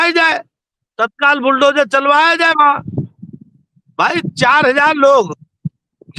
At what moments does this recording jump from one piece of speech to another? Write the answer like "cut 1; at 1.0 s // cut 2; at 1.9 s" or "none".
none